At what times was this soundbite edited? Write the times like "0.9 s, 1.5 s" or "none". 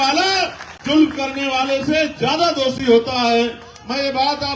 none